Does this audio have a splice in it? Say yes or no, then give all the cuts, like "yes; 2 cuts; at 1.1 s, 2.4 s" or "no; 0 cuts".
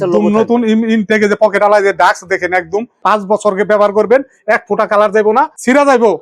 yes; 1 cut; at 3.0 s